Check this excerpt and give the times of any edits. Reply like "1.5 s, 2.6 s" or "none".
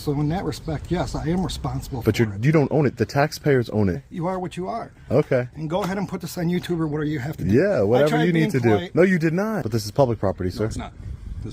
4.0 s, 9.7 s